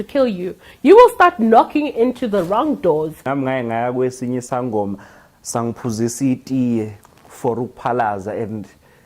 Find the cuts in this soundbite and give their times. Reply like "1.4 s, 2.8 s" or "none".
3.2 s